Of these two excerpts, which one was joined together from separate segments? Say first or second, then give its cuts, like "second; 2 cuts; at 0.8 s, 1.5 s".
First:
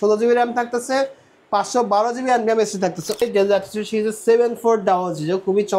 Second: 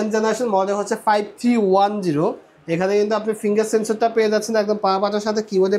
first; 1 cut; at 3.2 s